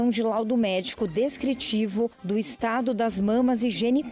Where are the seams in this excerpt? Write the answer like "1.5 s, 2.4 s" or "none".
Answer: none

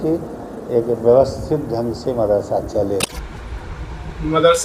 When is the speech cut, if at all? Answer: 3.5 s

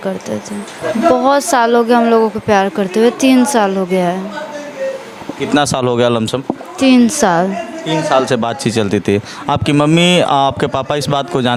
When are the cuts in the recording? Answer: none

